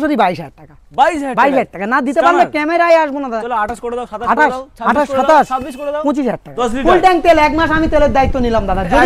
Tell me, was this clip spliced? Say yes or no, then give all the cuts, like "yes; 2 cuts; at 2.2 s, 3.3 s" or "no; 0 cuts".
yes; 2 cuts; at 3.4 s, 6.5 s